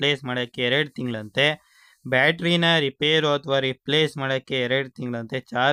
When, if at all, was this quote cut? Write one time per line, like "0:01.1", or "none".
none